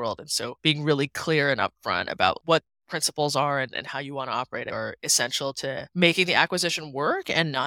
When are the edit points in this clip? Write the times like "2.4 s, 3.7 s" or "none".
none